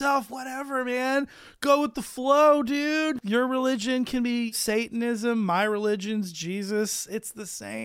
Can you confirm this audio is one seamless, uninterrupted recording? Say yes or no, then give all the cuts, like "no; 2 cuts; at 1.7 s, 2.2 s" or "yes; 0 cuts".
no; 2 cuts; at 3.2 s, 4.5 s